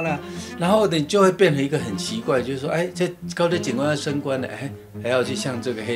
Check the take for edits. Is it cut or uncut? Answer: uncut